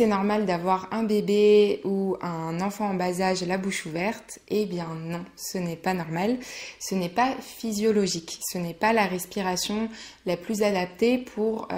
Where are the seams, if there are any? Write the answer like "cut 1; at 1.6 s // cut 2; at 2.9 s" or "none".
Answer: none